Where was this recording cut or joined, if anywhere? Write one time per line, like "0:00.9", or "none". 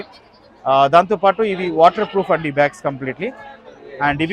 none